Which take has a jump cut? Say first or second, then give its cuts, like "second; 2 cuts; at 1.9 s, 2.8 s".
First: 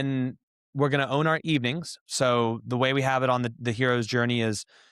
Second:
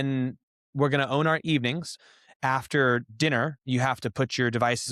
second; 1 cut; at 2.0 s